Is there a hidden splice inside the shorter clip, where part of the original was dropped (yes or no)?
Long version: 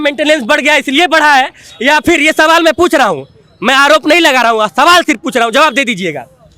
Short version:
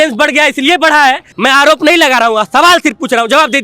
yes